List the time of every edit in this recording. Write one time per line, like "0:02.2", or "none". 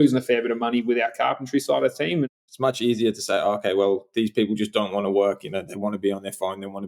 0:02.3

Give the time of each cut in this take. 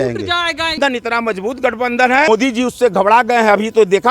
0:00.8
0:02.3

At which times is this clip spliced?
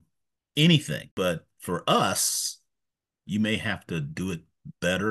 0:01.1

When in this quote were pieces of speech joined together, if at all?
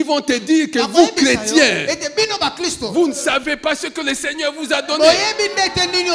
none

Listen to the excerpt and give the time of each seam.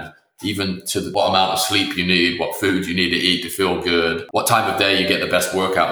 0:01.1

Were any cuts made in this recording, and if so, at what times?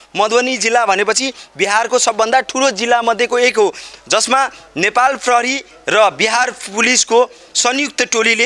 none

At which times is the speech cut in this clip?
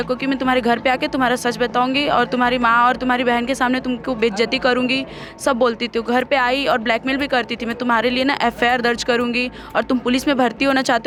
none

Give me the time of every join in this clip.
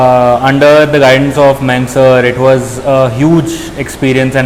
none

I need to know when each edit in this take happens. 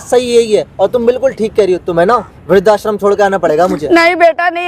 none

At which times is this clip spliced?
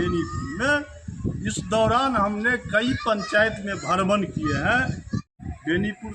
0:05.2

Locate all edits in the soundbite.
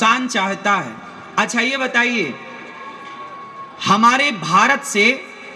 none

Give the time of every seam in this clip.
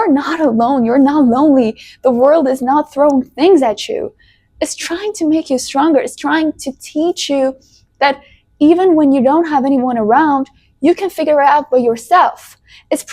none

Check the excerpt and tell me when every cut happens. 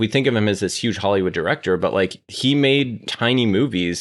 0:03.1

